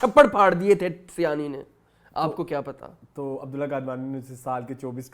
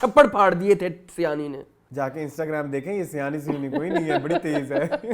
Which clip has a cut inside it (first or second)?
second